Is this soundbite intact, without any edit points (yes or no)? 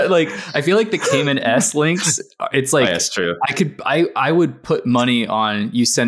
yes